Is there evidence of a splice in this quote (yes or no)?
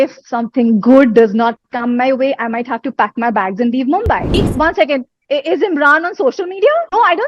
yes